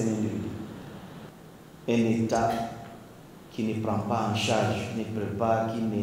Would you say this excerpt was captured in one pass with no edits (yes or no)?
no